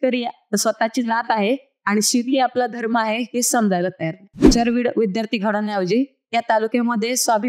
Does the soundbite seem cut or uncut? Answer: cut